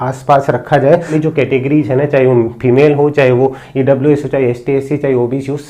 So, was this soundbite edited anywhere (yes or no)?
yes